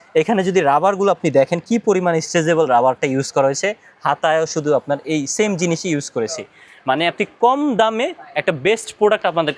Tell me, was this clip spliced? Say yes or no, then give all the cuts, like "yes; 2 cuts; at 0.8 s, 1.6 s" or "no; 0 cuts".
no; 0 cuts